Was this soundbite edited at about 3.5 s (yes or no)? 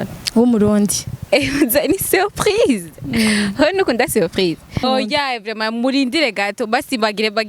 no